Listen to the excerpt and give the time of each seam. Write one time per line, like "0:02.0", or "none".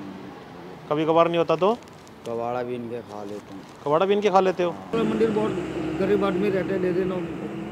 0:04.9